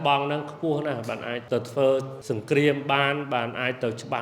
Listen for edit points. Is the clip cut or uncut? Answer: cut